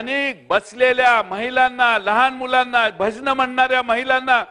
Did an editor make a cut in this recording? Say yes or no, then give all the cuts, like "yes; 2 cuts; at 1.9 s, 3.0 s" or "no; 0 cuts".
no; 0 cuts